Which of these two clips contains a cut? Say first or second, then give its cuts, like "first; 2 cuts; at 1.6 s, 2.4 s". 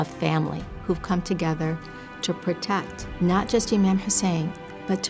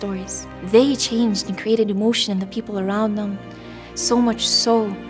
first; 2 cuts; at 0.8 s, 3.0 s